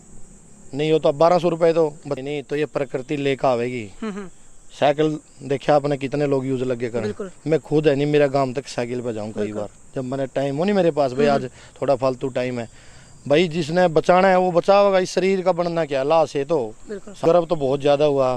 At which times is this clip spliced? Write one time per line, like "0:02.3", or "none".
0:02.1
0:17.1